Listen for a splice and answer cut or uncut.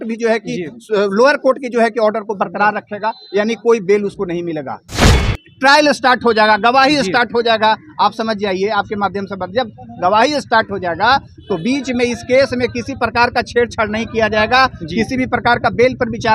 cut